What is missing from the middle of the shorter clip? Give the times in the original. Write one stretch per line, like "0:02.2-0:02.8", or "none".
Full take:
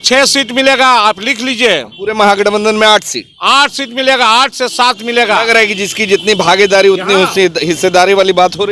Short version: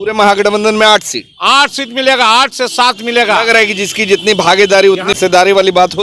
0:07.1-0:07.7